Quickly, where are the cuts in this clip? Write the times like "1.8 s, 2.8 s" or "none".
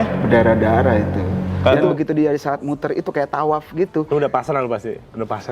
1.8 s